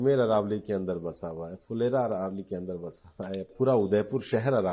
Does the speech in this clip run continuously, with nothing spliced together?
no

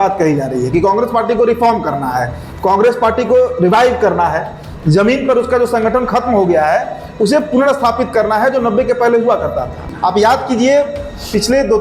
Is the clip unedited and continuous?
no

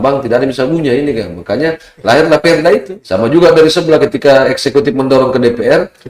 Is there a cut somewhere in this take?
yes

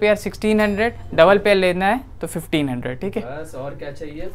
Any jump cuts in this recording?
no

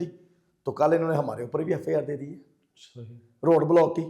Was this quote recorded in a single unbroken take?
yes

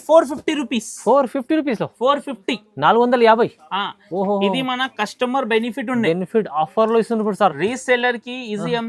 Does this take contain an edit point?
no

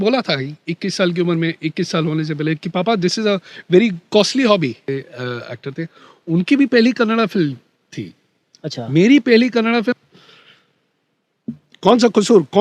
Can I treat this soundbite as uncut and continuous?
no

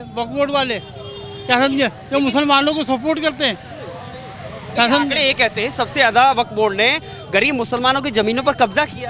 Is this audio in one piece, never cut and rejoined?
yes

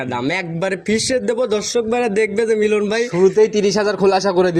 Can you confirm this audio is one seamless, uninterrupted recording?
yes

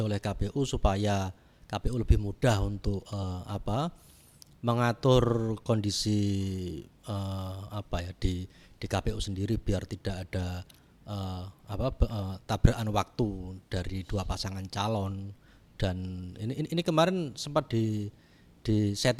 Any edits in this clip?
no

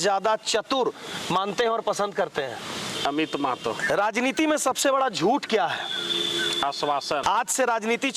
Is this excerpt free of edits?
no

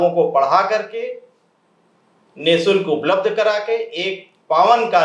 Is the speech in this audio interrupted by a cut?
no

